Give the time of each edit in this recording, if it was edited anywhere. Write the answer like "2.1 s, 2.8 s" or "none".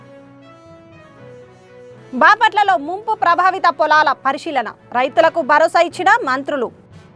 1.7 s